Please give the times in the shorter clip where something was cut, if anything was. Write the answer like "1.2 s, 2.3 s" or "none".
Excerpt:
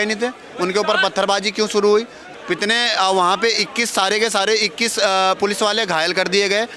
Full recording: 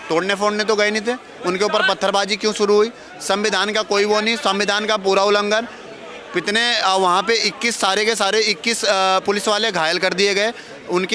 2.2 s